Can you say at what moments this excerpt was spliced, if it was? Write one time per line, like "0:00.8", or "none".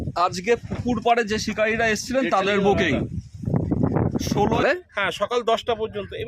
0:04.6